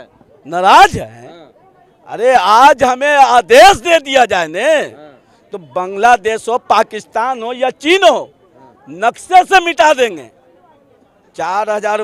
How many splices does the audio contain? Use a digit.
0